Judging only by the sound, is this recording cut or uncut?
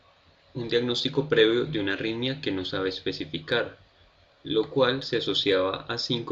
cut